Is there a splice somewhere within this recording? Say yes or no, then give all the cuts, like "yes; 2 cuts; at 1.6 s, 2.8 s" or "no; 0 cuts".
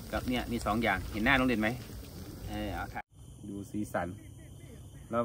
yes; 1 cut; at 2.9 s